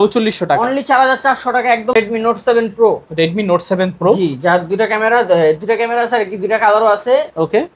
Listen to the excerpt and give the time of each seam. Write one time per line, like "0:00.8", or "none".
0:01.9